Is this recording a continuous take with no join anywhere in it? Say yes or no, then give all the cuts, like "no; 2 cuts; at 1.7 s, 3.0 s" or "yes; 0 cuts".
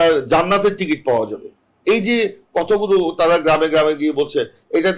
yes; 0 cuts